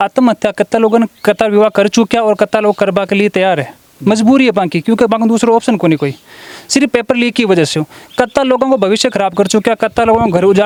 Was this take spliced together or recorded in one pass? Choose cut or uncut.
uncut